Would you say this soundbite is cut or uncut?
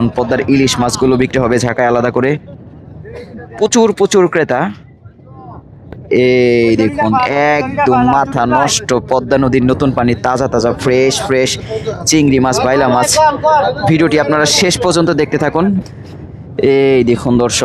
cut